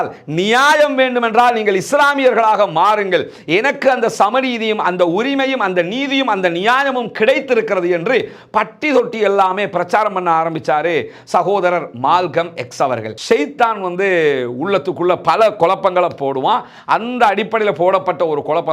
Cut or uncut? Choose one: cut